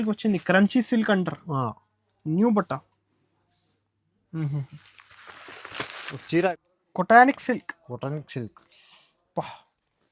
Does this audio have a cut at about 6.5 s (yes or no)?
yes